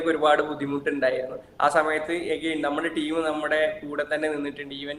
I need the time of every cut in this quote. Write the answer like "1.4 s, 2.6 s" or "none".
none